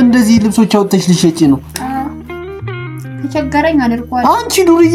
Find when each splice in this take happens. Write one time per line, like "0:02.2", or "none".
none

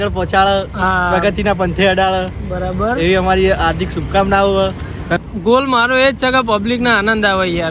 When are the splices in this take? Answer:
0:05.2

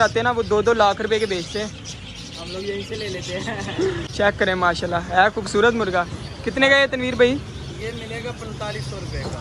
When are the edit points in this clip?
0:04.1

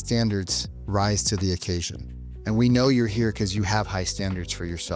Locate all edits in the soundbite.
none

